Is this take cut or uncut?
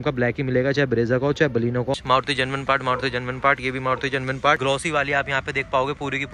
cut